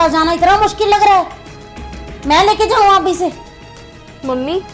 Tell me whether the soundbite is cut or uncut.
uncut